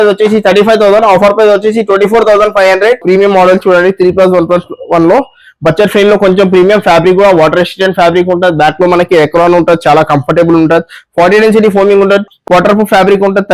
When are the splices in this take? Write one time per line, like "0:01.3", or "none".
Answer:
0:03.0